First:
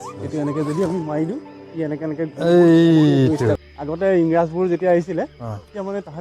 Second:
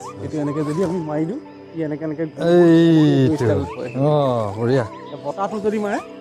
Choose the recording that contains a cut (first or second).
first